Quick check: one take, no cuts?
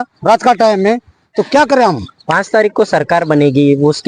yes; 0 cuts

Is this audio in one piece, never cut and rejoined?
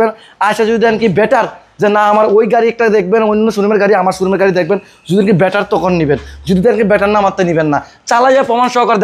yes; 0 cuts

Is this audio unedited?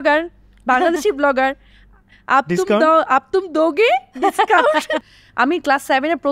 no; 1 cut; at 5.0 s

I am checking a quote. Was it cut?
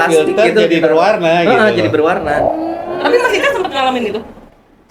no; 0 cuts

